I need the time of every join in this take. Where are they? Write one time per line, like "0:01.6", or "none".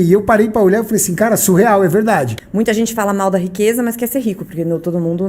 0:02.4